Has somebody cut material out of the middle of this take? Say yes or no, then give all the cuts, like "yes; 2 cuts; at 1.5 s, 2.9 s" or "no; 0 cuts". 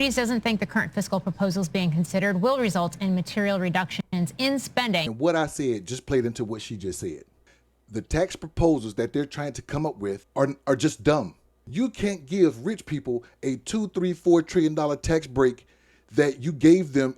no; 0 cuts